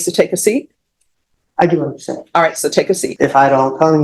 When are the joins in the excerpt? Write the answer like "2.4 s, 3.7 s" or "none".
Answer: 3.1 s

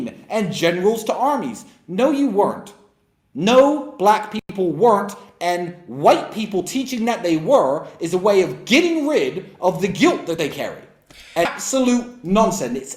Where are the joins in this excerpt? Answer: 11.5 s

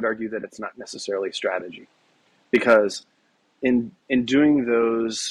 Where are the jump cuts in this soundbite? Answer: none

